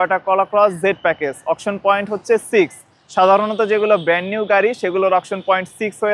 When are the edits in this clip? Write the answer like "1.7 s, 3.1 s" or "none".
none